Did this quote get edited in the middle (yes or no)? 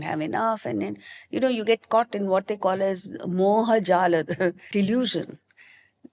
yes